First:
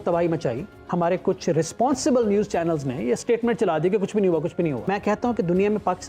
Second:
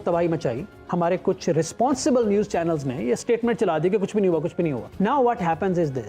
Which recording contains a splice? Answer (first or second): first